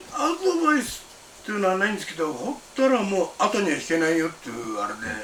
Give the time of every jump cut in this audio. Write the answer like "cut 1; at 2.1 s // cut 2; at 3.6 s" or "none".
none